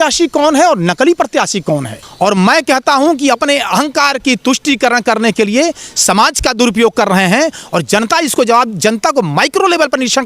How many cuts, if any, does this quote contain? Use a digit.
1